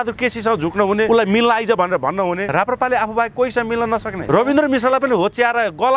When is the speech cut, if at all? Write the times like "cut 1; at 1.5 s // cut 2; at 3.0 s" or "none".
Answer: cut 1; at 1.1 s // cut 2; at 2.4 s // cut 3; at 4.2 s